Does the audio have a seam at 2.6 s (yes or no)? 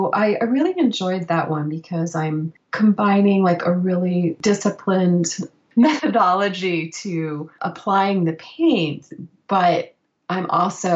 yes